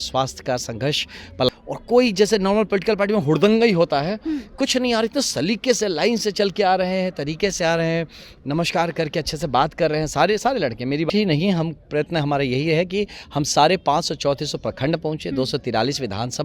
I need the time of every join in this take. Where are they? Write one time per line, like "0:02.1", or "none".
0:01.5
0:11.1